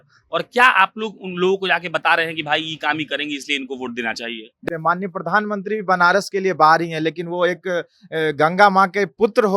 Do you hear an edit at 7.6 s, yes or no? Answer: no